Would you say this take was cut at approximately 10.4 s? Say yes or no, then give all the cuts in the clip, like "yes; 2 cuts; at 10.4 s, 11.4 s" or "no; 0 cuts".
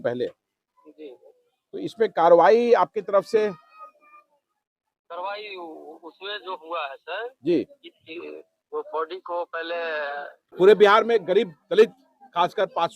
yes; 1 cut; at 10.4 s